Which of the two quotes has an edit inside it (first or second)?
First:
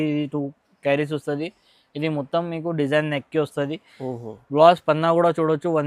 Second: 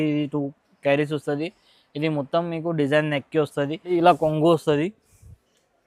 second